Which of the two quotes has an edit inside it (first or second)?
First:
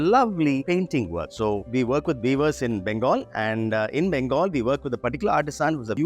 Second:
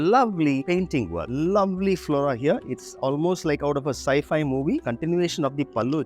second